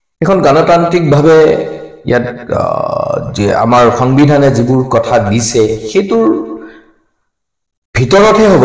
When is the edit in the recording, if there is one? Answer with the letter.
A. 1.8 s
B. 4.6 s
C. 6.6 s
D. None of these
D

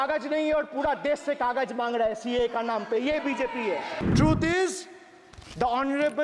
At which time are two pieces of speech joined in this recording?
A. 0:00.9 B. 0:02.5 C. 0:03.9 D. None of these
C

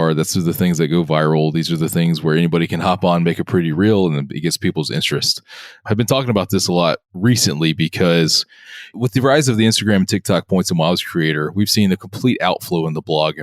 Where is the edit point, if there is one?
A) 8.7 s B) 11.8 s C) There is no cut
A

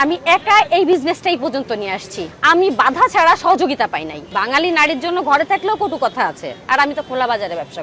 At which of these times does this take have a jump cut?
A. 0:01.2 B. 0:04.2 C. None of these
B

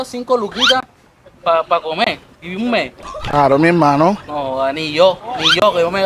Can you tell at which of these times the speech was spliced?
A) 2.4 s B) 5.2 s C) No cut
C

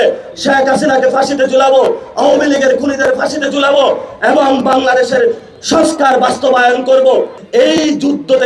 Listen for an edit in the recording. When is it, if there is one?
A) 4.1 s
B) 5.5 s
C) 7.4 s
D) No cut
C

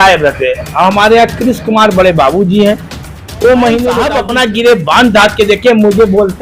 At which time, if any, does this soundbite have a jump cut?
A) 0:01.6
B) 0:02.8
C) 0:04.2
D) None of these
C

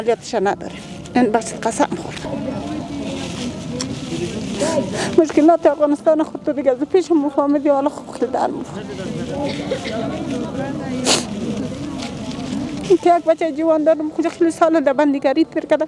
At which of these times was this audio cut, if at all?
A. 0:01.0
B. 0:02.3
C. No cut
B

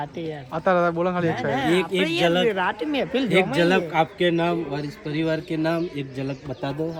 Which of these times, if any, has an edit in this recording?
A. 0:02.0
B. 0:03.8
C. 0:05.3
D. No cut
D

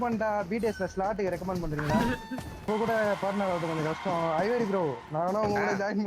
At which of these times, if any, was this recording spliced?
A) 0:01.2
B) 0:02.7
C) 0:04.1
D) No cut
B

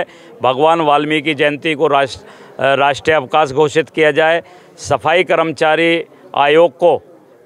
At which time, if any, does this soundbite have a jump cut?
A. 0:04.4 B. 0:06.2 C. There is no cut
C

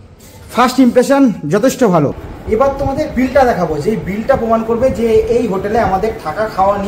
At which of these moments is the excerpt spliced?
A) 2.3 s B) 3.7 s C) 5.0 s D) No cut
A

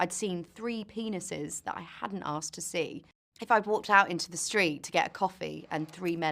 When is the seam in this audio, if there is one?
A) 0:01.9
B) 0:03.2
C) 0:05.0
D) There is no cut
B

